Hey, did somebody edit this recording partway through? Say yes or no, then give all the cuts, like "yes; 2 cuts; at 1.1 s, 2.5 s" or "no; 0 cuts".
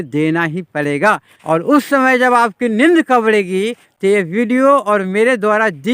yes; 1 cut; at 1.3 s